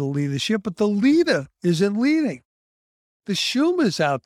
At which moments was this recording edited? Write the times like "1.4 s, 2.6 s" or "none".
none